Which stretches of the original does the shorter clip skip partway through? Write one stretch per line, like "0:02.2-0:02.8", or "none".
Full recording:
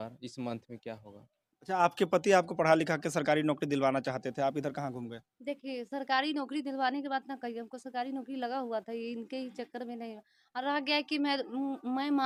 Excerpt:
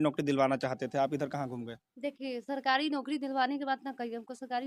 none